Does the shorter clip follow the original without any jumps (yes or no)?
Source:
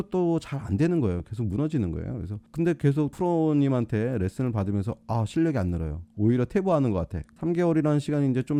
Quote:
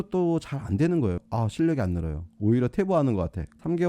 no